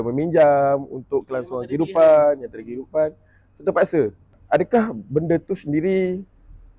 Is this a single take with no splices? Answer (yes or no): no